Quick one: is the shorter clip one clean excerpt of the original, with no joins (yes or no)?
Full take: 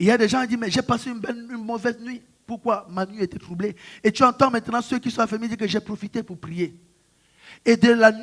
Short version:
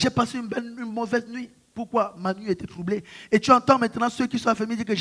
yes